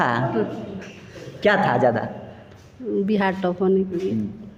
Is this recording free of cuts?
yes; 0 cuts

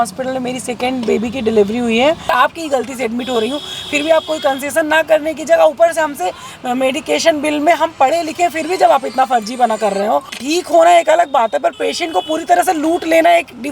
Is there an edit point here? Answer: yes; 2 cuts; at 2.3 s, 10.4 s

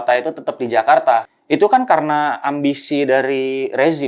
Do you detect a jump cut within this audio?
yes; 1 cut; at 1.3 s

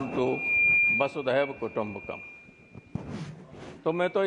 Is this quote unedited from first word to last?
yes; 0 cuts

